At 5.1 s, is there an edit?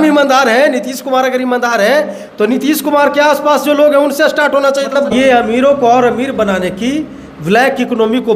yes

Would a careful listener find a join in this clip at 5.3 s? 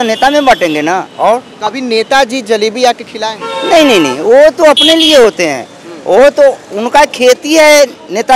no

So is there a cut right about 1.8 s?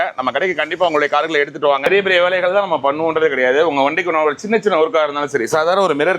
yes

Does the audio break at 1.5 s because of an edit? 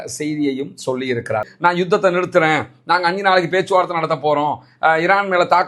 yes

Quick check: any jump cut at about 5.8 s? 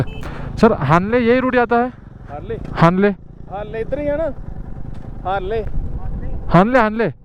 no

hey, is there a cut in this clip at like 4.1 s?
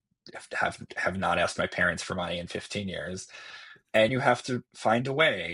yes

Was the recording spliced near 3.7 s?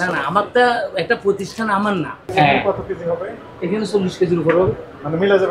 no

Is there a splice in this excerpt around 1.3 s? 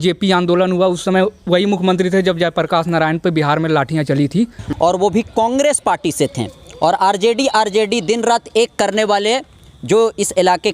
no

